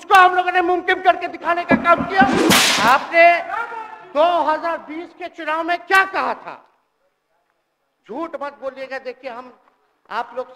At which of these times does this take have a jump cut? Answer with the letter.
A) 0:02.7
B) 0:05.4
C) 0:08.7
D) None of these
A